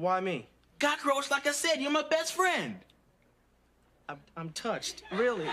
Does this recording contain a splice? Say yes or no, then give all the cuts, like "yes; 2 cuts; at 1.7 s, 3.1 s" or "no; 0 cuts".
no; 0 cuts